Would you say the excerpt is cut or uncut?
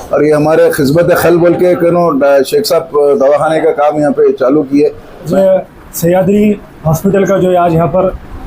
cut